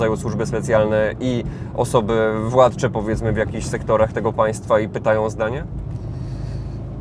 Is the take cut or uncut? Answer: uncut